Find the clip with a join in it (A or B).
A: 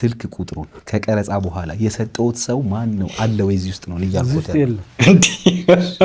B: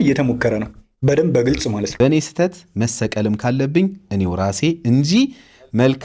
B